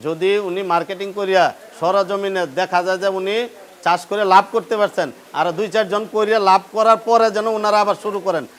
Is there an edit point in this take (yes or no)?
no